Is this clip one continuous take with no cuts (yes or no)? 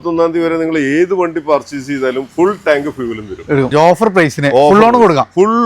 no